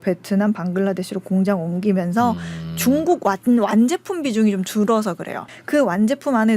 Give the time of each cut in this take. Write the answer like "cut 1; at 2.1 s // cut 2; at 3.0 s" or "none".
cut 1; at 5.5 s

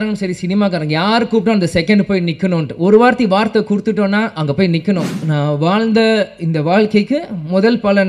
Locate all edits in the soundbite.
cut 1; at 5.2 s

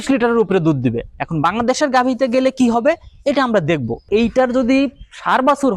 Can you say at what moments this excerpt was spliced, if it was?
cut 1; at 4.0 s

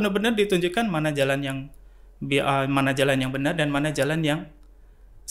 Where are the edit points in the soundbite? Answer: none

